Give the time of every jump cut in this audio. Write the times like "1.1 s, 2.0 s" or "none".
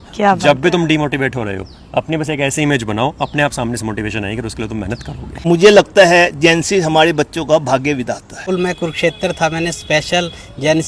5.3 s, 8.4 s